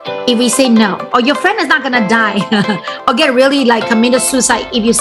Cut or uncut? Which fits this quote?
uncut